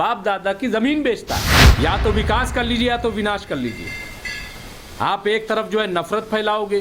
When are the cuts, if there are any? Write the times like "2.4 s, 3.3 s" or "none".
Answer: 1.6 s